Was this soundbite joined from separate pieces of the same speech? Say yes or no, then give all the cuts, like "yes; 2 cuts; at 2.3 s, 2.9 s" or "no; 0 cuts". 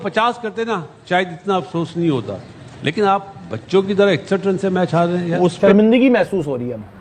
no; 0 cuts